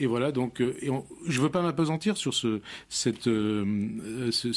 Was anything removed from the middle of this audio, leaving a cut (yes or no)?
no